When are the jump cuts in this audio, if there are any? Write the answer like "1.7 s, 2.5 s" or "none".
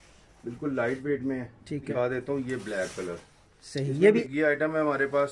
1.9 s, 4.2 s